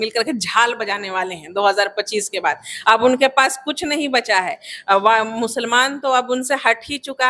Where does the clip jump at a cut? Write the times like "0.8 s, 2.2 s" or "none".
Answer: none